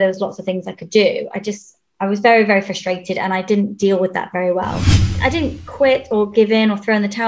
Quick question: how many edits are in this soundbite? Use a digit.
2